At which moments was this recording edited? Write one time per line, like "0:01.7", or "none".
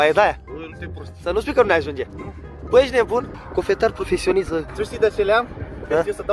0:03.4
0:04.7